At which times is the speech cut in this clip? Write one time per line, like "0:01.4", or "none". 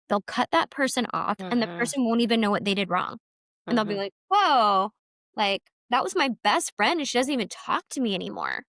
none